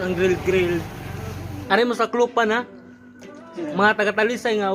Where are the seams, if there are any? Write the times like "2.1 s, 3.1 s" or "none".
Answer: 1.5 s